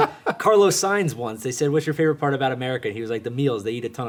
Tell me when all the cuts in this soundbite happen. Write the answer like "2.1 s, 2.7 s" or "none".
none